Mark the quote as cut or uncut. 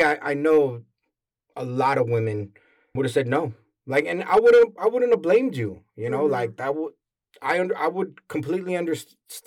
uncut